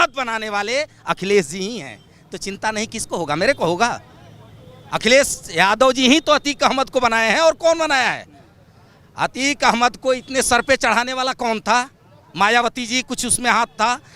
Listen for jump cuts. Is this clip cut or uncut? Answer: uncut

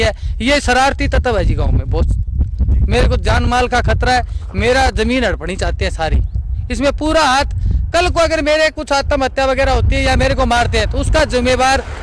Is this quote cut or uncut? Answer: uncut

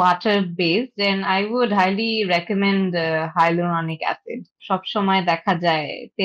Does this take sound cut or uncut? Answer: cut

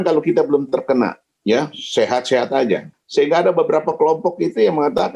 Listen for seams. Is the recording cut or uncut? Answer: cut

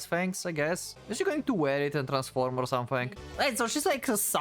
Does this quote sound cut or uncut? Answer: cut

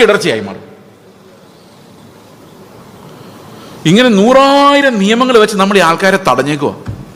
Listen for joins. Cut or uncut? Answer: uncut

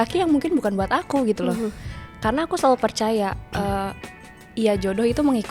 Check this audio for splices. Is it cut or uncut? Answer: uncut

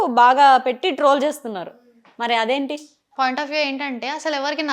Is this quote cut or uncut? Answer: cut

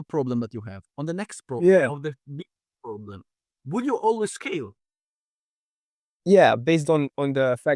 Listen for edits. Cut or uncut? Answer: uncut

